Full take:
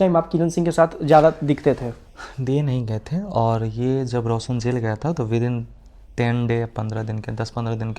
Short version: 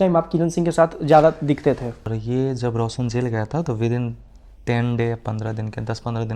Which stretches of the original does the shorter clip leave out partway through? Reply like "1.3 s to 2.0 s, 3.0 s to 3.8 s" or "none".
2.2 s to 3.7 s